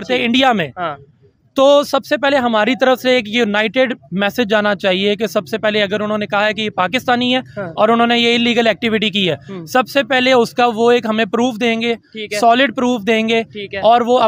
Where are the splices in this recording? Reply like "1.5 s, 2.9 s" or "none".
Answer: none